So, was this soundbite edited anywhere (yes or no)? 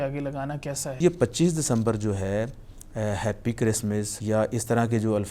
yes